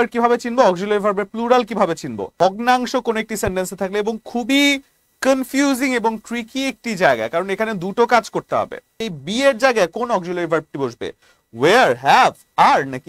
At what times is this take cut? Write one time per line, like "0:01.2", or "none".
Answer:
0:02.2
0:09.1